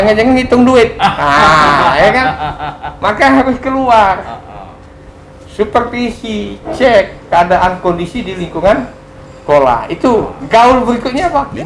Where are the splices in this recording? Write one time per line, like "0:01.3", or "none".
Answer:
none